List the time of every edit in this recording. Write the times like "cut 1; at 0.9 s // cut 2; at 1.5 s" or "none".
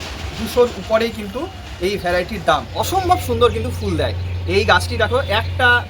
cut 1; at 2.7 s